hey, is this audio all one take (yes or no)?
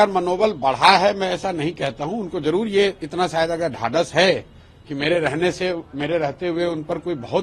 yes